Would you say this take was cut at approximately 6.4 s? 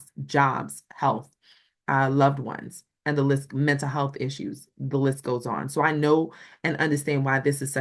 no; 0 cuts

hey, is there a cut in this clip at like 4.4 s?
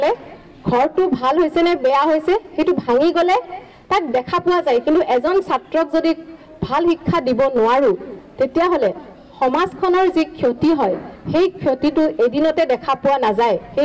no; 0 cuts

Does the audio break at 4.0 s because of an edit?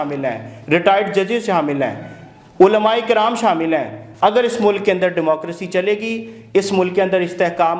yes; 1 cut; at 4.0 s

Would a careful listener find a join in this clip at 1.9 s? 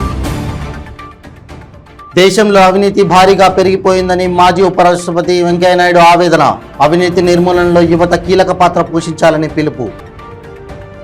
yes; 1 cut; at 1.9 s

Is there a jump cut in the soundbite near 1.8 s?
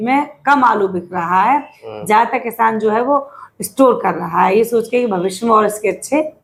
no; 0 cuts

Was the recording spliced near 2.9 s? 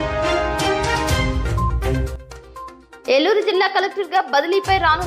yes; 1 cut; at 2.9 s

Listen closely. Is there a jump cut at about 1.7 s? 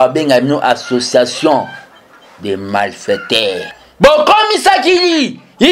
no; 1 cut; at 3.8 s

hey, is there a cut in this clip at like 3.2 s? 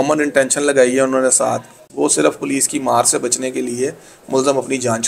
no; 1 cut; at 1.8 s

